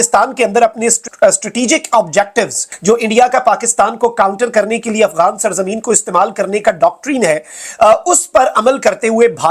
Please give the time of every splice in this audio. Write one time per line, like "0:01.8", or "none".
0:01.1
0:02.6